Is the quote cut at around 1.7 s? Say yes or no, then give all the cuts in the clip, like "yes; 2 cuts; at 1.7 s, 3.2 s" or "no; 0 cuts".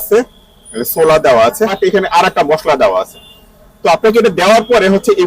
yes; 1 cut; at 1.7 s